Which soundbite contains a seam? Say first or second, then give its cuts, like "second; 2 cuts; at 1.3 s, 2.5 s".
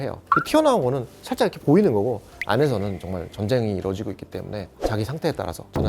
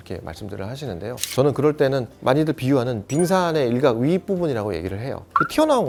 first; 1 cut; at 4.7 s